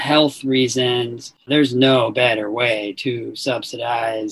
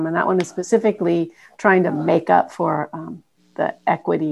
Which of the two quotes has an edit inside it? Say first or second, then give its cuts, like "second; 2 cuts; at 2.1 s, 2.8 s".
first; 1 cut; at 1.4 s